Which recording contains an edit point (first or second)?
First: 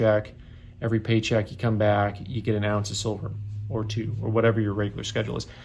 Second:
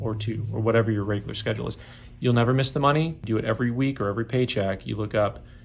second